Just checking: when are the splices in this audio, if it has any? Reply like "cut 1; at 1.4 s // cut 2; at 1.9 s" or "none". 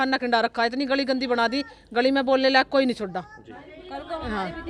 none

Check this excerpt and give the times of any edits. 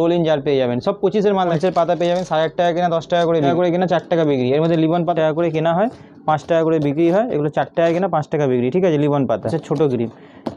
cut 1; at 1.5 s // cut 2; at 3.5 s // cut 3; at 5.1 s // cut 4; at 9.6 s

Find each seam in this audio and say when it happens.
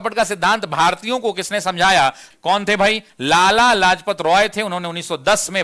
cut 1; at 2.3 s

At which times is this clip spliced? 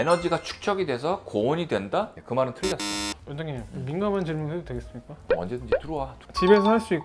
cut 1; at 3.2 s

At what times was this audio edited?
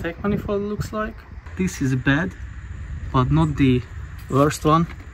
cut 1; at 1.4 s

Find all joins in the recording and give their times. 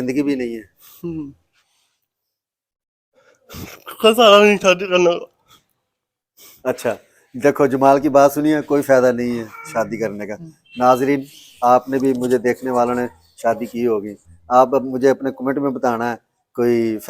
none

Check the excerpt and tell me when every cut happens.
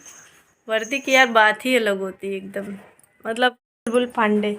cut 1; at 3.6 s

